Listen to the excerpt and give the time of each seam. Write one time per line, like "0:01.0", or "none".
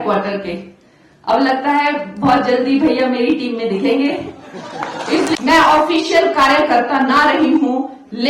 0:05.4